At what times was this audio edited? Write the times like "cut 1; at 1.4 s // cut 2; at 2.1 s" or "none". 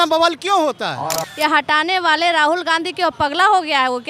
cut 1; at 1.3 s